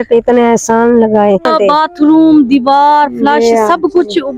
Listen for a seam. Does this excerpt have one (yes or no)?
yes